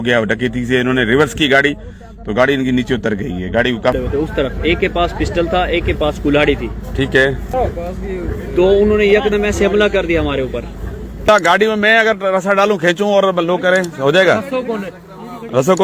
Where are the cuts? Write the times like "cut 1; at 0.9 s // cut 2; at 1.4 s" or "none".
cut 1; at 3.9 s // cut 2; at 7.4 s // cut 3; at 11.3 s